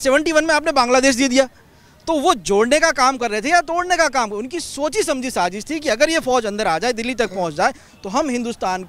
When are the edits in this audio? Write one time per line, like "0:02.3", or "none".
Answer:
none